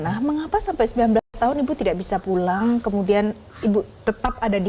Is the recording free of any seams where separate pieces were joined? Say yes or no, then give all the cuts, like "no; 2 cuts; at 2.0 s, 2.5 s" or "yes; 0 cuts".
yes; 0 cuts